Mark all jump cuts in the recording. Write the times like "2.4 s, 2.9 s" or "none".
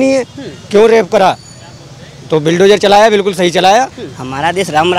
4.1 s